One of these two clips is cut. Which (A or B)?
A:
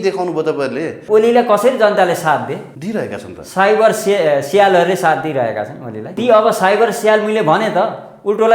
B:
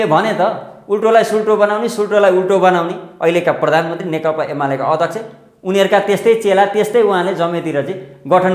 A